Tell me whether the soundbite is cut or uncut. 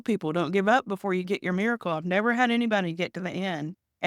cut